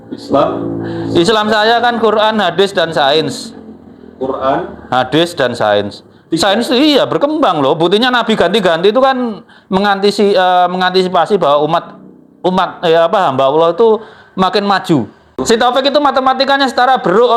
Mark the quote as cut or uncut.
cut